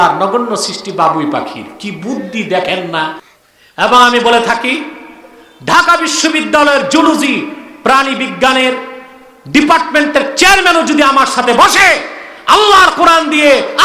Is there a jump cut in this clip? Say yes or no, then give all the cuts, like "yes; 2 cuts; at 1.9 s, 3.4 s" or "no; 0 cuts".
yes; 1 cut; at 3.2 s